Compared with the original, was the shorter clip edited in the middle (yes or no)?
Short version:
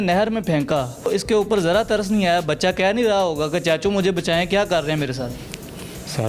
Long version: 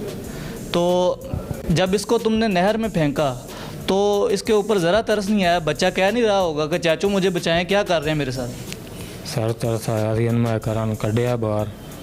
yes